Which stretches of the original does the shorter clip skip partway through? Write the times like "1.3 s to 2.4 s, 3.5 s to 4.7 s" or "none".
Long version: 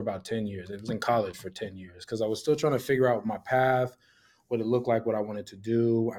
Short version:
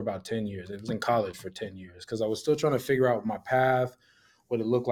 none

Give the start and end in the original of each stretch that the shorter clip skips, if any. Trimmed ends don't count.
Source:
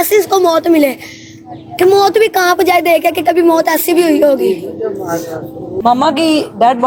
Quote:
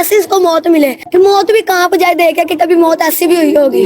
1.0 s to 1.7 s

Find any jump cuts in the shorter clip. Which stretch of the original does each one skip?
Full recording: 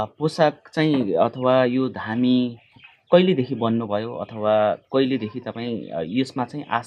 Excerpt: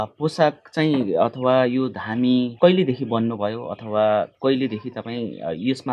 2.5 s to 3.0 s

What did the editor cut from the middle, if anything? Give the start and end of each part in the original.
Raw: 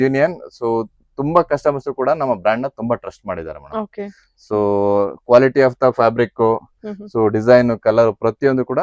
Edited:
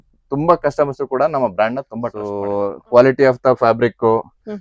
3.1 s to 4.6 s

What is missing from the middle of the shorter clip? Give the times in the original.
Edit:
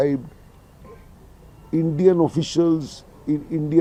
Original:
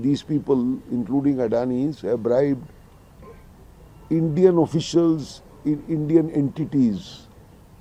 none

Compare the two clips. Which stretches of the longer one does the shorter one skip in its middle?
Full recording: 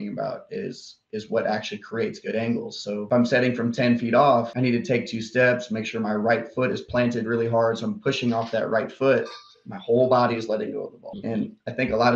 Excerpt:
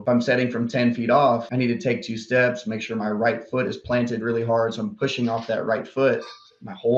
none

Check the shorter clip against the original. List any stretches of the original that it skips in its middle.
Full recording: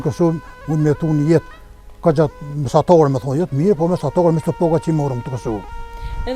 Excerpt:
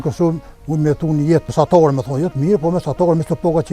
1.5 s to 2.6 s

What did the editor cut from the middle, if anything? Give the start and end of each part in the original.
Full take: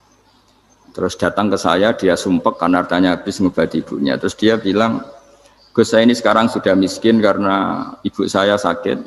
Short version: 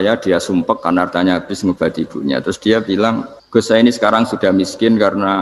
5.1 s to 5.6 s

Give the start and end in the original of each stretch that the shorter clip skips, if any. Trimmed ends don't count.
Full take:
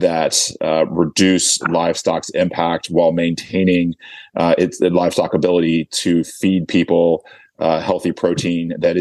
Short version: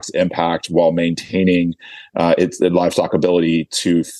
none

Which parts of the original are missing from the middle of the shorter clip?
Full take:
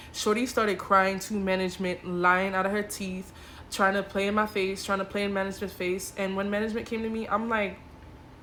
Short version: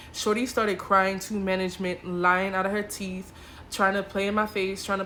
none

